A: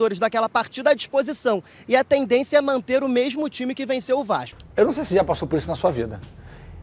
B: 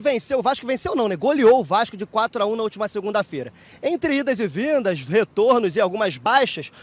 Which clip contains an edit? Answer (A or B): A